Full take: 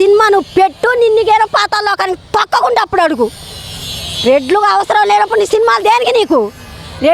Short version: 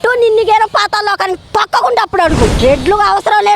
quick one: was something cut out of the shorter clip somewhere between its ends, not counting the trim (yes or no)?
yes